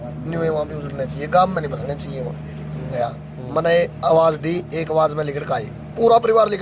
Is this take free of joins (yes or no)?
no